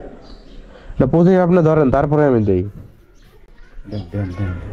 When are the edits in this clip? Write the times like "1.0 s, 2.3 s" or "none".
none